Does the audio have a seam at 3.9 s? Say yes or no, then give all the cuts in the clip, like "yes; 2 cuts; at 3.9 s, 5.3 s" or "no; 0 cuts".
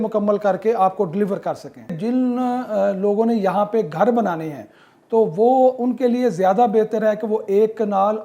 no; 1 cut; at 2.0 s